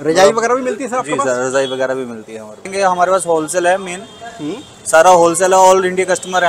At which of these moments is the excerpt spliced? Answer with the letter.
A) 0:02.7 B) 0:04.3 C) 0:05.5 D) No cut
A